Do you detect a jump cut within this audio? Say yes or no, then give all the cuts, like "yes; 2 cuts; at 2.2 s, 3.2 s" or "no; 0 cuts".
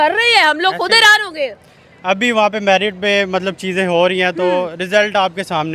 no; 0 cuts